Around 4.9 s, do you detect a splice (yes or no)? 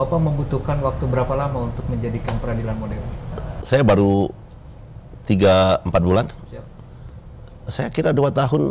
no